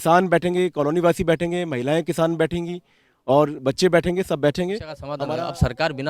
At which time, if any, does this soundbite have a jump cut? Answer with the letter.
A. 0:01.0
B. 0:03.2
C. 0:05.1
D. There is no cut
C